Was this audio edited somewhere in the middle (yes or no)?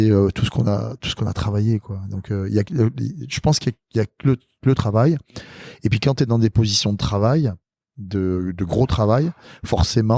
no